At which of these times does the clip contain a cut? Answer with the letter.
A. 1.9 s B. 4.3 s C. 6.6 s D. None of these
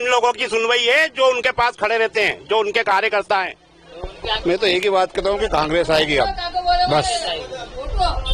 B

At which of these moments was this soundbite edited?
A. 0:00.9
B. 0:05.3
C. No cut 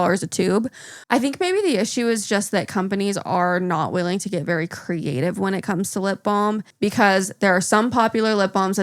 A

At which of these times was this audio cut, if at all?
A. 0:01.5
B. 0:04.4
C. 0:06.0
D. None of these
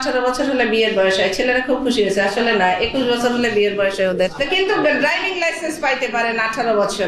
B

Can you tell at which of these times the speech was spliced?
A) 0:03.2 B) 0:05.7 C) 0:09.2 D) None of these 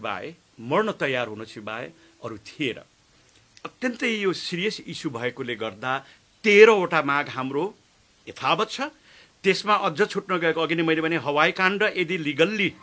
A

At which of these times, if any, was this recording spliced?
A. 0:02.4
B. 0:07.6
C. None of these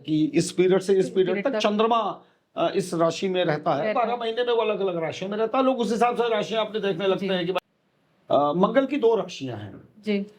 B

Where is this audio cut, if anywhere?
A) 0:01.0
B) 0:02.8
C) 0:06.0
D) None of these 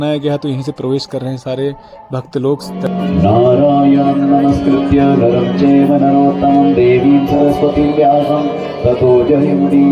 B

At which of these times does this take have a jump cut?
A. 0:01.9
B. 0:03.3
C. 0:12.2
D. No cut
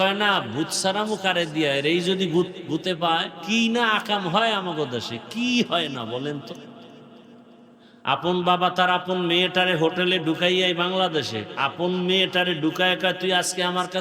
B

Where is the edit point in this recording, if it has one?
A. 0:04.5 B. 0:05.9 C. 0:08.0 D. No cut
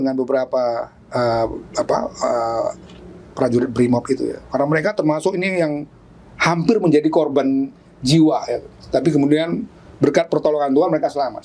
D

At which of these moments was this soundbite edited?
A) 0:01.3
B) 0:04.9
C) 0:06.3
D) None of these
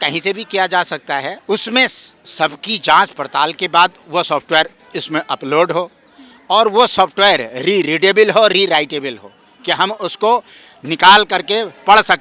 A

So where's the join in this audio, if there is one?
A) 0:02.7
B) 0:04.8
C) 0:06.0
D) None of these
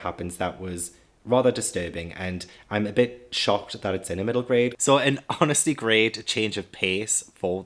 B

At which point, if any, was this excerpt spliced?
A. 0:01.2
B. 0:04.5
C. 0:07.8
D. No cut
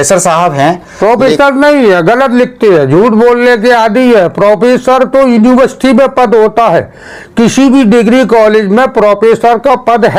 D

